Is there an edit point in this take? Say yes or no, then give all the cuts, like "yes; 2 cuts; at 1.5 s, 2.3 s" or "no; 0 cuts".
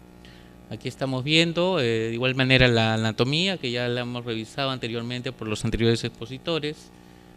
yes; 1 cut; at 4.6 s